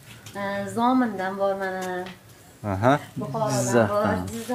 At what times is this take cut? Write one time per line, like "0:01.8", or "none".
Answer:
none